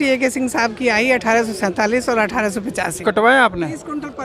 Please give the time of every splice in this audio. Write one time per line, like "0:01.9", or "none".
0:03.0